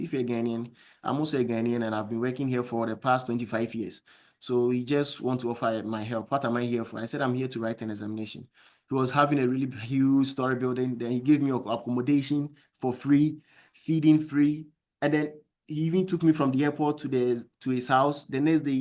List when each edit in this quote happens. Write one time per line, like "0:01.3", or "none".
none